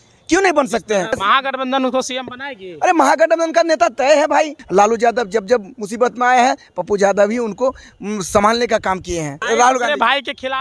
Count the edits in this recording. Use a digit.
3